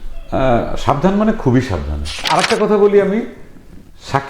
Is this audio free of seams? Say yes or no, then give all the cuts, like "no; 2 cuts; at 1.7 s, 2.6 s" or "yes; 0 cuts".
no; 1 cut; at 2.2 s